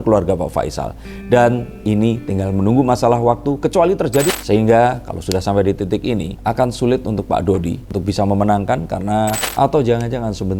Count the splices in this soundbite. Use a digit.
4